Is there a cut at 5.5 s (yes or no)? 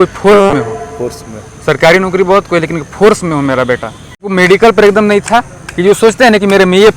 no